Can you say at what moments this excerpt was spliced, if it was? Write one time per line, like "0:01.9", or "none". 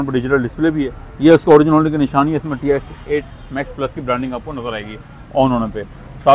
none